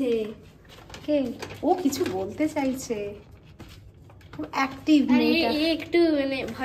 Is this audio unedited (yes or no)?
yes